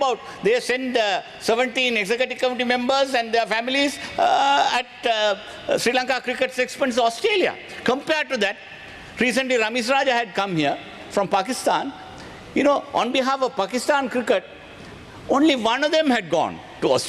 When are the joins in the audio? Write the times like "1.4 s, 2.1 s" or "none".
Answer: none